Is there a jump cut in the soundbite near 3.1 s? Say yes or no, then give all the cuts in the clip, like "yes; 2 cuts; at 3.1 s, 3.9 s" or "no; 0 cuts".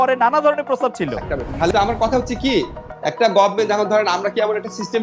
no; 1 cut; at 1.7 s